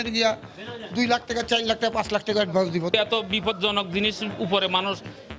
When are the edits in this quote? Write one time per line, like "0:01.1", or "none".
0:02.9